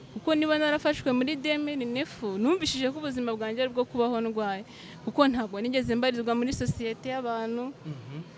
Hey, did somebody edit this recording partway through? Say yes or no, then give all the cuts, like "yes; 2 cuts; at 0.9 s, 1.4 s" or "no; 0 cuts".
no; 0 cuts